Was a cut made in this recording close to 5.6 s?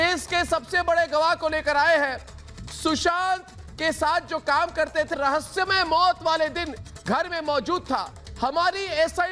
no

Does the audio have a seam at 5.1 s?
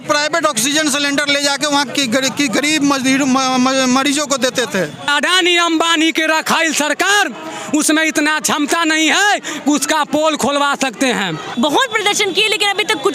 yes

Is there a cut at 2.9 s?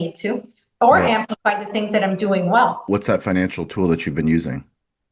yes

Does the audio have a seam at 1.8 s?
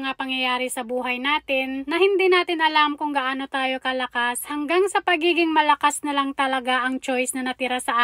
no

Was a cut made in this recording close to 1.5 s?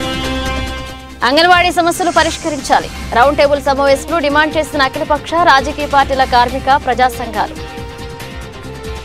no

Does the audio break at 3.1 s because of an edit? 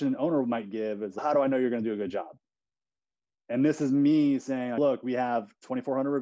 no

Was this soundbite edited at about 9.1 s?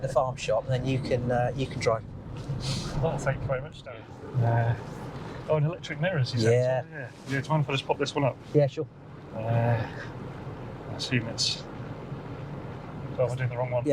no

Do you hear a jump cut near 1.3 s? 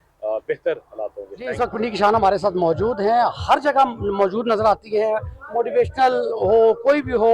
yes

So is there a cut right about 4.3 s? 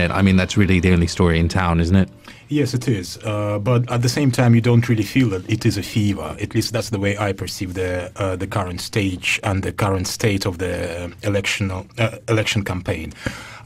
no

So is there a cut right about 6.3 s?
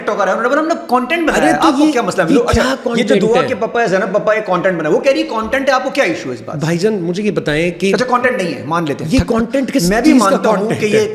no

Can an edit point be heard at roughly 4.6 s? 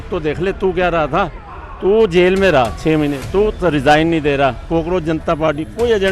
yes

